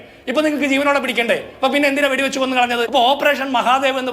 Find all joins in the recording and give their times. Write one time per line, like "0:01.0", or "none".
0:02.9